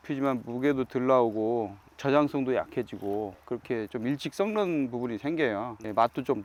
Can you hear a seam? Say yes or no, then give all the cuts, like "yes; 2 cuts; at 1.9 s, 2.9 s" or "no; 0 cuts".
no; 0 cuts